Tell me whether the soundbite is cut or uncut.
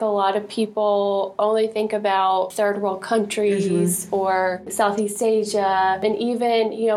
cut